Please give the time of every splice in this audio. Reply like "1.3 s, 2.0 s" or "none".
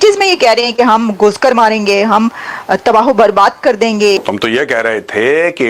4.2 s